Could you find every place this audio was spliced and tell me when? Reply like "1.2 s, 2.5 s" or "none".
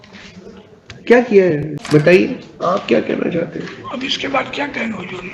1.7 s